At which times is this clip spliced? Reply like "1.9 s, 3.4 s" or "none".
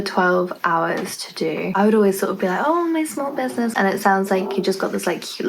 1.7 s, 3.7 s